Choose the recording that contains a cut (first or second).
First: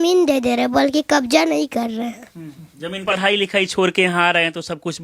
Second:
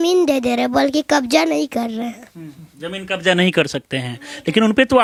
first